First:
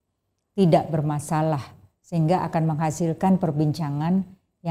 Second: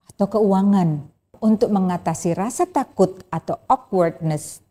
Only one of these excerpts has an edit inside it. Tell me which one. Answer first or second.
second